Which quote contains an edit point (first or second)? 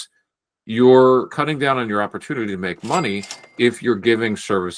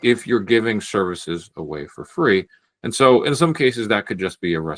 first